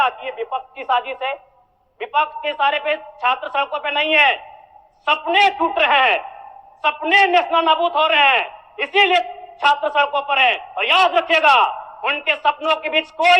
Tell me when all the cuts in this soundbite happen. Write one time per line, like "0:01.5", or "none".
none